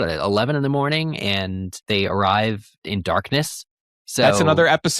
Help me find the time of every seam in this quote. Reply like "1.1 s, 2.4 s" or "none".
1.8 s, 2.8 s